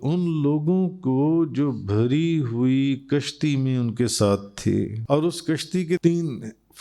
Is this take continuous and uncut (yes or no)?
no